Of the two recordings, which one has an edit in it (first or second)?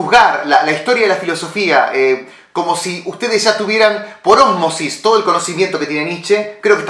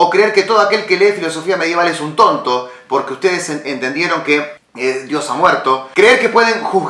second